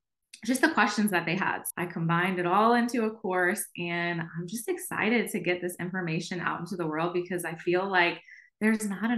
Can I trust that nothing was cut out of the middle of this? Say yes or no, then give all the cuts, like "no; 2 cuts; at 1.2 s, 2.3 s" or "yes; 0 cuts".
no; 1 cut; at 1.6 s